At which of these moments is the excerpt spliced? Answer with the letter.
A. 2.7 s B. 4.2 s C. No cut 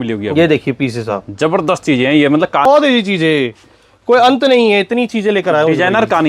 A